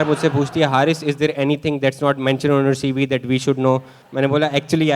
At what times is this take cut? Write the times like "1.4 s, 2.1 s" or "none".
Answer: 4.0 s